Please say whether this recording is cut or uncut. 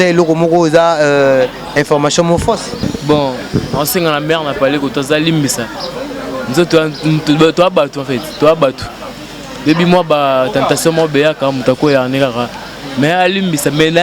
cut